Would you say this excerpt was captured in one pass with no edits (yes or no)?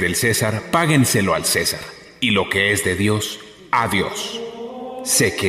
yes